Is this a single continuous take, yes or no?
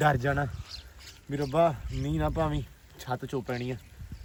yes